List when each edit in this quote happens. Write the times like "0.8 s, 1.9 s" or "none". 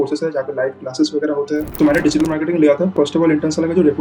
1.7 s, 2.9 s